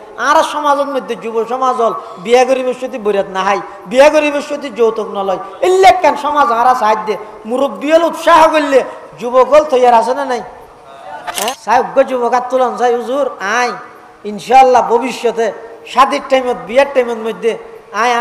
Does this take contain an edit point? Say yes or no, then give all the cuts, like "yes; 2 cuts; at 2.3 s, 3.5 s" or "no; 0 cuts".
yes; 1 cut; at 11.5 s